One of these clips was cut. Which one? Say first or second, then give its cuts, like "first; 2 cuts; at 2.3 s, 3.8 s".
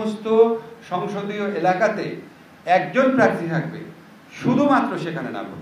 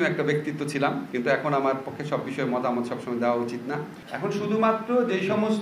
second; 1 cut; at 4.0 s